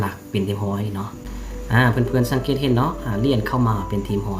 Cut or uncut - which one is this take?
cut